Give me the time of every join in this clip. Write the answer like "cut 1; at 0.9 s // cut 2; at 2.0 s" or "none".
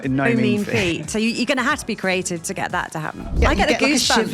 cut 1; at 3.2 s

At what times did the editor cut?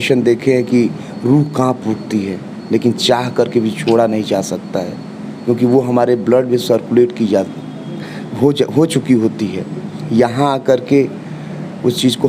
none

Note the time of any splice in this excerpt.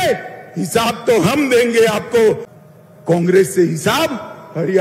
cut 1; at 2.5 s

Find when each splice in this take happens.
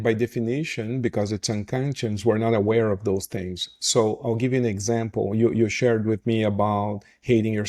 none

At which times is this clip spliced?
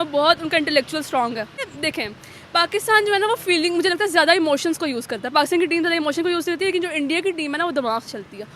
cut 1; at 1.7 s

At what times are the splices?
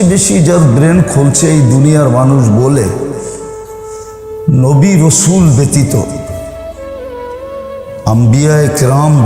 cut 1; at 3.1 s // cut 2; at 4.5 s // cut 3; at 6.3 s // cut 4; at 8.1 s

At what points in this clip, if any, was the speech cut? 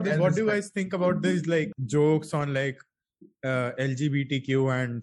cut 1; at 1.8 s

